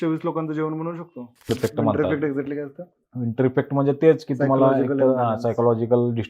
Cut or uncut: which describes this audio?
cut